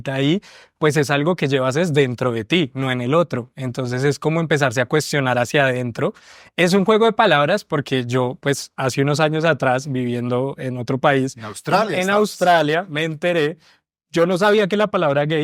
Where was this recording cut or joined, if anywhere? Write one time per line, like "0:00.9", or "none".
none